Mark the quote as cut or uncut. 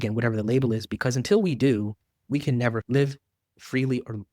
uncut